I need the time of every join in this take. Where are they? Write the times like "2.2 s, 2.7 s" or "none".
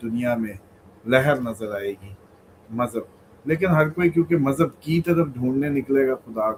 none